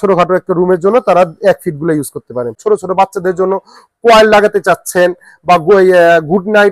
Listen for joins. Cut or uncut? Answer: cut